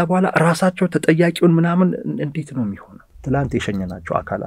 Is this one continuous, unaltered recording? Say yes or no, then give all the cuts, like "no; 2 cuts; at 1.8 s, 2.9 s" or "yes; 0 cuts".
no; 1 cut; at 3.1 s